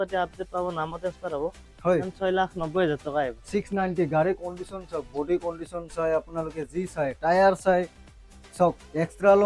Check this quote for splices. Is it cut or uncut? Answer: uncut